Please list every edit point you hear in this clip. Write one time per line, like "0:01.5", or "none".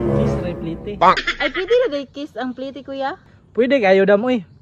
0:01.3